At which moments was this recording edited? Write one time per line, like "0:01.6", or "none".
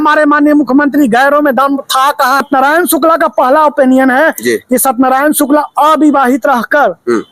0:02.4